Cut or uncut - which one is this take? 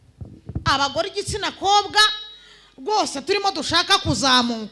uncut